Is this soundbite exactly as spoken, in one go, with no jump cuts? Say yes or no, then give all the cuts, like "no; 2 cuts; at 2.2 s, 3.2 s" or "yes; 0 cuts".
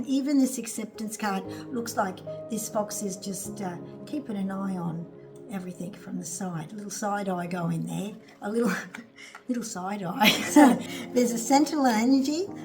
no; 1 cut; at 10.9 s